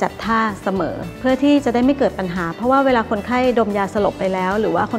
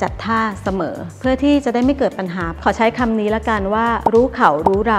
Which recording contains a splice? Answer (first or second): second